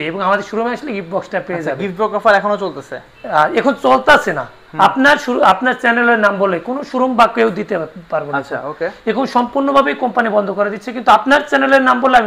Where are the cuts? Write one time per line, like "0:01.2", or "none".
none